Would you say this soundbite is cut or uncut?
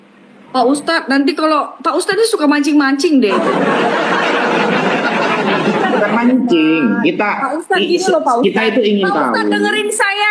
cut